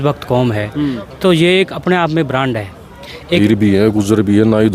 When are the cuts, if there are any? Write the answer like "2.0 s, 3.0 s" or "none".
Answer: 3.4 s

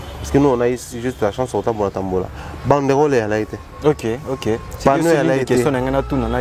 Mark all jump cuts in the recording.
none

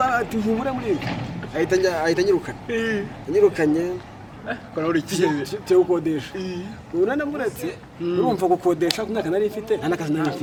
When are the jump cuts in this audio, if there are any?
none

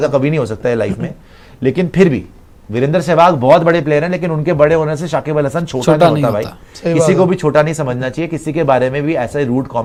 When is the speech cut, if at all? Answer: none

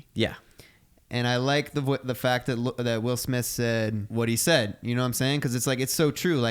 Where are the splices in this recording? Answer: 4.1 s

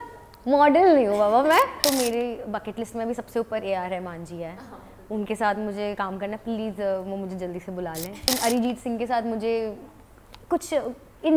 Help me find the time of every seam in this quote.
1.8 s, 8.3 s

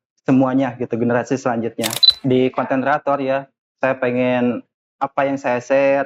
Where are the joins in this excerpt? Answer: 2.1 s

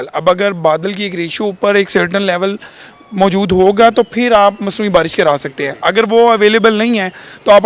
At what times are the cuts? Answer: none

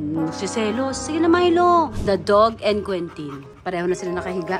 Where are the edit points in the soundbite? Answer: 1.9 s, 3.5 s

